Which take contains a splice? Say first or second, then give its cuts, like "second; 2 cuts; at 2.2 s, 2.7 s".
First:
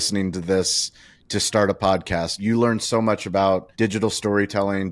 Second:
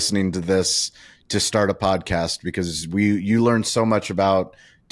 first; 2 cuts; at 2.4 s, 3.7 s